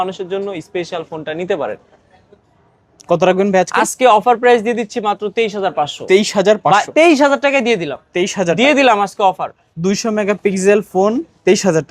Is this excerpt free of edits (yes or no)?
yes